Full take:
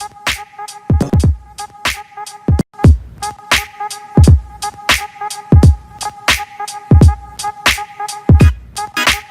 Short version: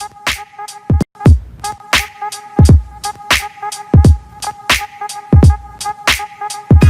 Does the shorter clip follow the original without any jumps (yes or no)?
no